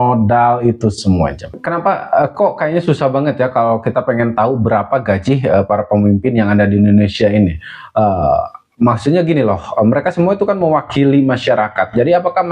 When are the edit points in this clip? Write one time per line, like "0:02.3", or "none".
0:01.5